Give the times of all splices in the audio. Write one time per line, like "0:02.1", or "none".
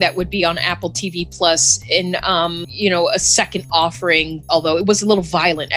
0:04.3